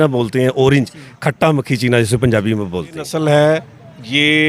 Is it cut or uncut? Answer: cut